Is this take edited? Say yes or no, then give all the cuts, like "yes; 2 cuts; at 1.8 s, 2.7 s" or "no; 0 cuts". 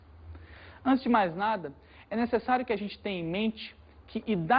yes; 1 cut; at 1.1 s